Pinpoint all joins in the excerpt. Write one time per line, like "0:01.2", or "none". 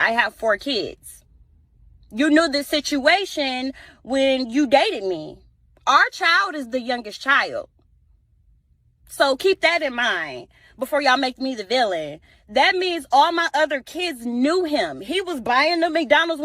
0:15.4